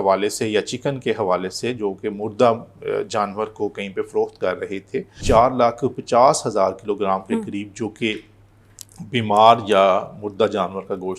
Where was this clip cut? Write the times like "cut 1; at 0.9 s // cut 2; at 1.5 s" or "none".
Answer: cut 1; at 5.2 s